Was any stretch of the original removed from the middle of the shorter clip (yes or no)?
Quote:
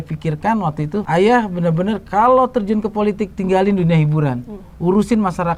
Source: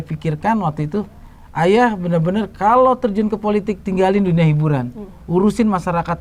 yes